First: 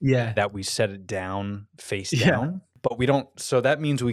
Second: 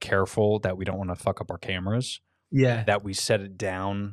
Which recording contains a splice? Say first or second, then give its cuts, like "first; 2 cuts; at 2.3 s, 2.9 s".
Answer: first; 1 cut; at 2.7 s